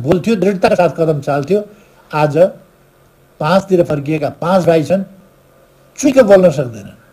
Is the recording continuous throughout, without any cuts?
yes; 0 cuts

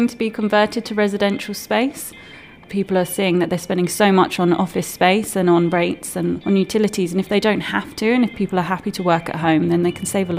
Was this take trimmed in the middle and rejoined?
yes; 2 cuts; at 2.6 s, 6.4 s

